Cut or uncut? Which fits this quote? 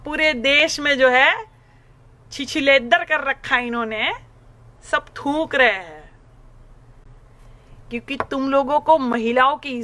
uncut